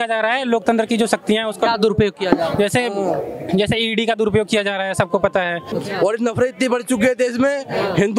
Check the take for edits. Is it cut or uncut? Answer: cut